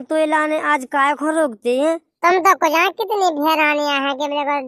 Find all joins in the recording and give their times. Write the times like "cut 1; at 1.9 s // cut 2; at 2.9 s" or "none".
cut 1; at 2.1 s